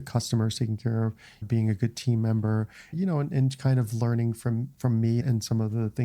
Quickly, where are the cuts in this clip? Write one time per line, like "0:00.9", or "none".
0:01.5
0:02.9
0:05.2